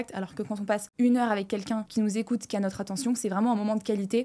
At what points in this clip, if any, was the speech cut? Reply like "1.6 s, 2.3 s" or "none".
none